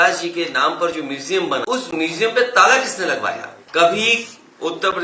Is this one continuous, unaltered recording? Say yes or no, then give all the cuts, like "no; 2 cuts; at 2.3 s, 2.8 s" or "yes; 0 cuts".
no; 2 cuts; at 1.6 s, 3.5 s